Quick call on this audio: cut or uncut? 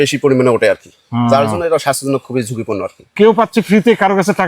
cut